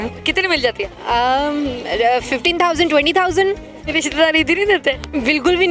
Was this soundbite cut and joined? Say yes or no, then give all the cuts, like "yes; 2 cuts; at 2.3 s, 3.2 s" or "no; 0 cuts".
yes; 1 cut; at 3.7 s